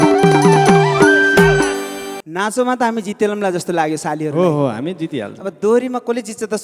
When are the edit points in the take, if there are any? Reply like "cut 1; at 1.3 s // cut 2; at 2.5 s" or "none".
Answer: cut 1; at 2.1 s